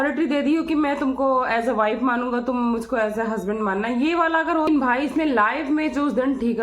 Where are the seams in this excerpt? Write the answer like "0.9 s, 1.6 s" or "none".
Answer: 4.7 s